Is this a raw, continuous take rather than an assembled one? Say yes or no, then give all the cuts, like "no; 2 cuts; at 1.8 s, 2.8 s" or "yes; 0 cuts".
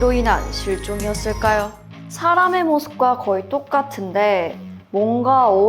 no; 1 cut; at 1.8 s